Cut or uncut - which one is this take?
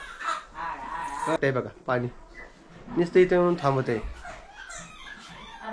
cut